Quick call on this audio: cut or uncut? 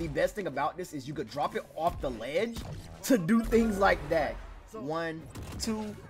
cut